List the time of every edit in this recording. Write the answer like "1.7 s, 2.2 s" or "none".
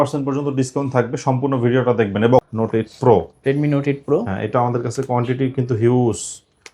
2.4 s